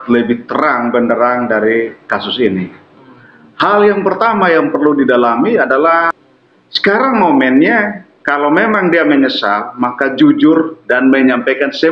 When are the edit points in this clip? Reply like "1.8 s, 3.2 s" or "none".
6.1 s